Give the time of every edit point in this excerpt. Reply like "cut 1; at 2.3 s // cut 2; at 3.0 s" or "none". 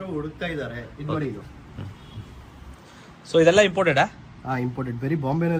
none